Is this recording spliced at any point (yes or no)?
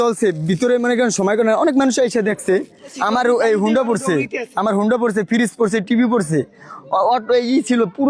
yes